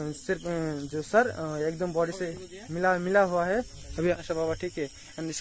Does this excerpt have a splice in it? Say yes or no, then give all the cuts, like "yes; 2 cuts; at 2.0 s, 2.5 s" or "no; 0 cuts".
yes; 1 cut; at 4.2 s